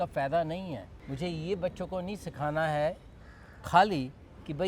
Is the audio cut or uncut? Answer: cut